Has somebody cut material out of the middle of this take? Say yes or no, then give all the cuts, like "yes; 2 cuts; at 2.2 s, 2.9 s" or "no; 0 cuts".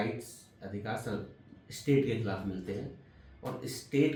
no; 0 cuts